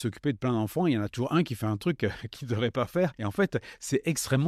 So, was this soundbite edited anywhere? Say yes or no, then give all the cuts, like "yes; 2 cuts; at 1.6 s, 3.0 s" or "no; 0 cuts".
no; 0 cuts